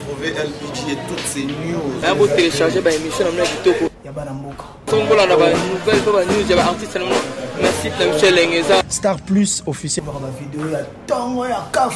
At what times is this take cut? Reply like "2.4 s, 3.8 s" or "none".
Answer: none